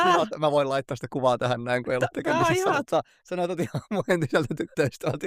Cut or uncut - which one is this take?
uncut